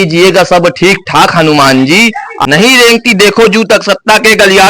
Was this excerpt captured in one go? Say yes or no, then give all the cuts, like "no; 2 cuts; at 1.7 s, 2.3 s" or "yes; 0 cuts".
no; 1 cut; at 2.3 s